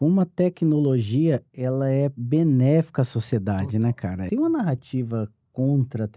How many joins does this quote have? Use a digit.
2